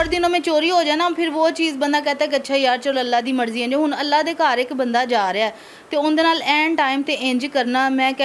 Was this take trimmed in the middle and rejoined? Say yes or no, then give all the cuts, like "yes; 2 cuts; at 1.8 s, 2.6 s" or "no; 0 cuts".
no; 0 cuts